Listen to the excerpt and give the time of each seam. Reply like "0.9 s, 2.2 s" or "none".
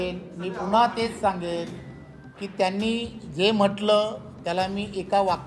none

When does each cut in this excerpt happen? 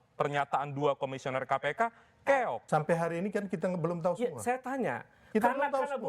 2.6 s

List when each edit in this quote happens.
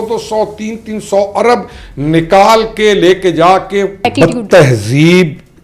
4.1 s

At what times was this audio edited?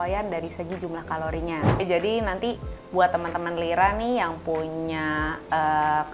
1.8 s

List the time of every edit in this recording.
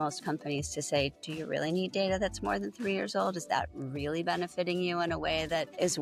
none

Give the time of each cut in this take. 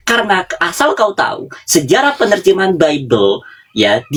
none

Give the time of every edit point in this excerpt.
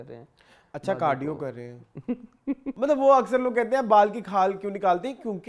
2.8 s

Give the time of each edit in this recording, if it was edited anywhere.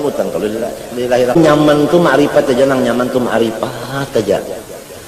1.4 s

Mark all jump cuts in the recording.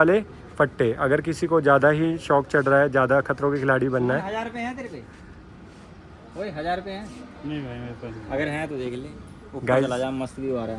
none

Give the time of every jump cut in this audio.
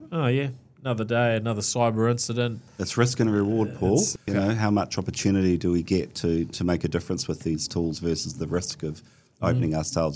2.6 s, 4.2 s

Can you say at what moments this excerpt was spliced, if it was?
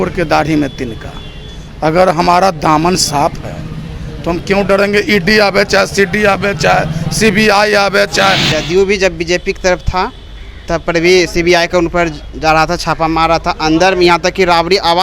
8.4 s

